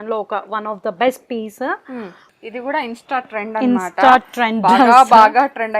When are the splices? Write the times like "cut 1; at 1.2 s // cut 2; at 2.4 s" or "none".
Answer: cut 1; at 2.1 s